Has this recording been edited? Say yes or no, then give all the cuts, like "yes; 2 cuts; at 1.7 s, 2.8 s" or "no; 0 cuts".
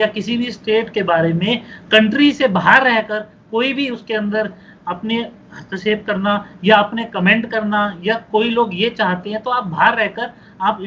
no; 0 cuts